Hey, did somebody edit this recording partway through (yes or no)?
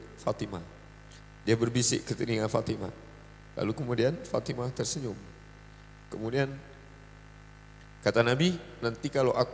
no